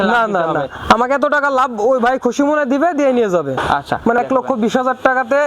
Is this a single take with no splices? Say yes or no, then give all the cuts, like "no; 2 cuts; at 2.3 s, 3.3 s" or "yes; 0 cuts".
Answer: no; 1 cut; at 4.2 s